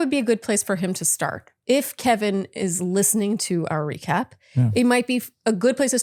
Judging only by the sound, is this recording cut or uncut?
uncut